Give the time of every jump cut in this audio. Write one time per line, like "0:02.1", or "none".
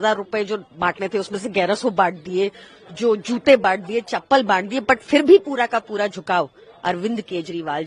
none